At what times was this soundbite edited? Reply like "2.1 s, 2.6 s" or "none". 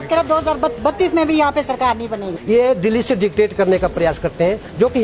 2.4 s